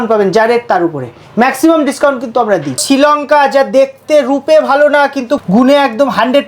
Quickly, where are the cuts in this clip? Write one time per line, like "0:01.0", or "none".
0:02.8
0:05.4